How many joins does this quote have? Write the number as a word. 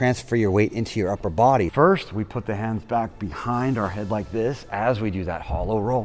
one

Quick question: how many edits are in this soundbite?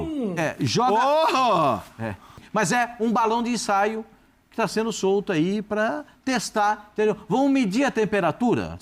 one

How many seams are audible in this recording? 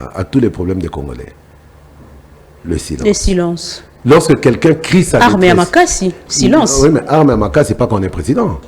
zero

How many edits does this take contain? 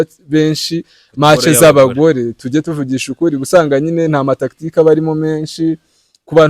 zero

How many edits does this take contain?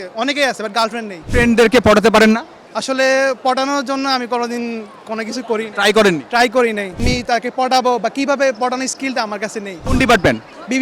three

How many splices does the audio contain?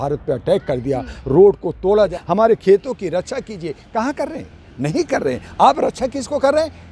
one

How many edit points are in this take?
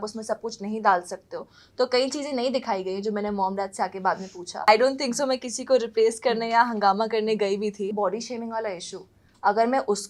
two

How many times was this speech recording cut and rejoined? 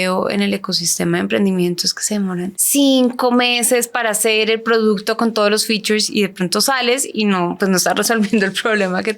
one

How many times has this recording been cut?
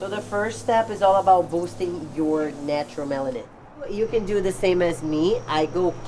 one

